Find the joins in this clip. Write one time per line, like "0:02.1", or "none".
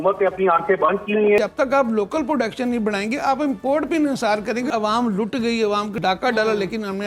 0:01.4
0:04.7
0:05.9